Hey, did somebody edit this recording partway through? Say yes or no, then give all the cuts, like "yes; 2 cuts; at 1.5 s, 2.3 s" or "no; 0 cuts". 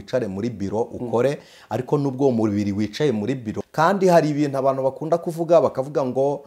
yes; 1 cut; at 3.5 s